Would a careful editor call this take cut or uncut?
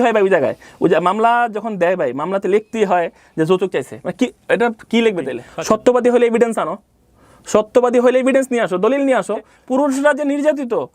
cut